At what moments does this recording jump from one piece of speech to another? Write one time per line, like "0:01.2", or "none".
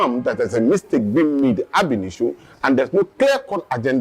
none